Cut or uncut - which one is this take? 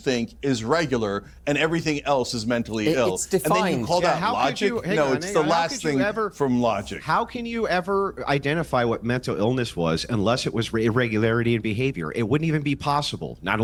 uncut